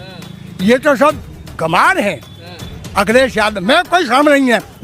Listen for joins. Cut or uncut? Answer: uncut